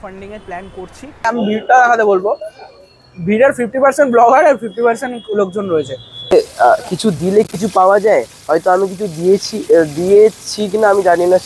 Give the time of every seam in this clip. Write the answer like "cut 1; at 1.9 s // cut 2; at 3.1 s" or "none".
cut 1; at 1.3 s // cut 2; at 6.3 s